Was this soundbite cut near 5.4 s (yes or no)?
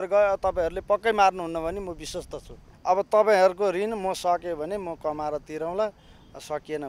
no